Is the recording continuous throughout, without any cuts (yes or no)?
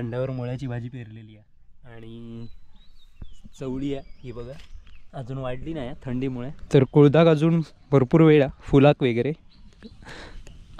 no